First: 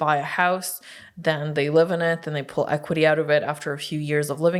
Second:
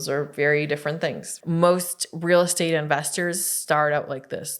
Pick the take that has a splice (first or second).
second